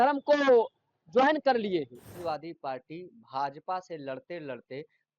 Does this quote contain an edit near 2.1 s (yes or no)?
yes